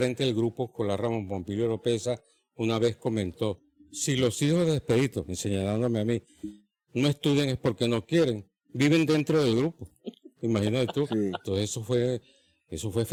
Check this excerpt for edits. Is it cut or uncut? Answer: uncut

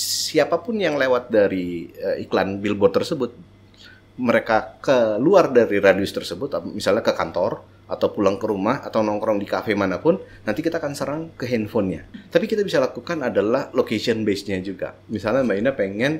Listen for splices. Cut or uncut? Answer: cut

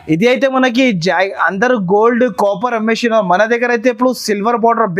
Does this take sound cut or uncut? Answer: uncut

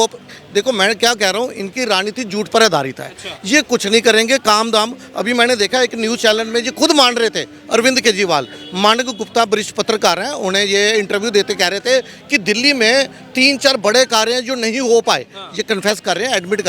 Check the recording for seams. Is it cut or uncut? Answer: uncut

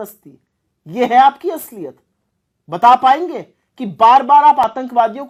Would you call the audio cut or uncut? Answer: uncut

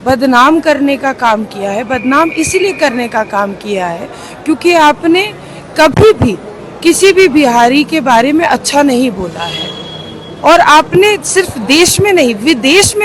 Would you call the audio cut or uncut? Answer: uncut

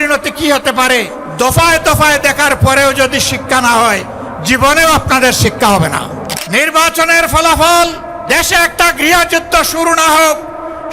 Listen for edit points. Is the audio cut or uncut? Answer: cut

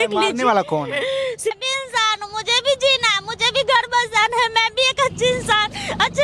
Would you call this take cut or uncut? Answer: cut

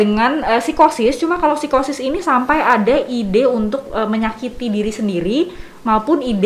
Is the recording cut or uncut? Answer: uncut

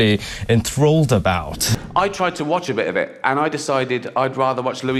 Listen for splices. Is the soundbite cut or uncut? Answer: cut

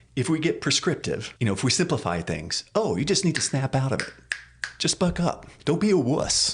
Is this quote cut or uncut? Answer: cut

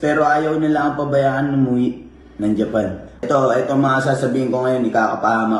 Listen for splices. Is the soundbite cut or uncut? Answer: cut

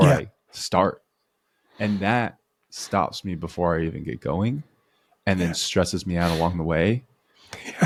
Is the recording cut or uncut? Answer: uncut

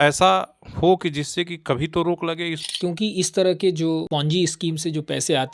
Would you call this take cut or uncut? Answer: cut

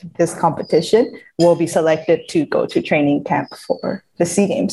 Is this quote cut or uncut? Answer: uncut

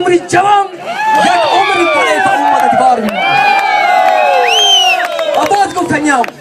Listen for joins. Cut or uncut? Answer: cut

